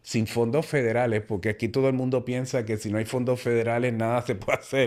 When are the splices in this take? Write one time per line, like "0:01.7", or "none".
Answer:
none